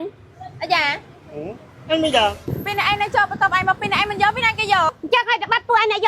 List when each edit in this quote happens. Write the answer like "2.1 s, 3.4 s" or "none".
2.5 s